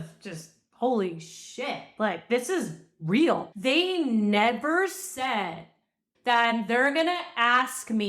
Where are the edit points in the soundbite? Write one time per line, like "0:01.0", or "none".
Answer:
0:03.5
0:06.0